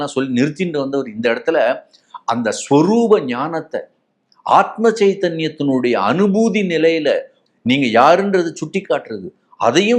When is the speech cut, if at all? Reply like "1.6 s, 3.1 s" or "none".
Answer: 7.3 s